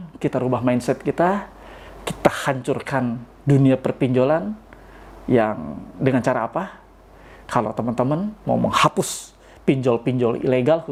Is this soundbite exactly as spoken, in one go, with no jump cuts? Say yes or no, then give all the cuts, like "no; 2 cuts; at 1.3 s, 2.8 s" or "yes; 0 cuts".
yes; 0 cuts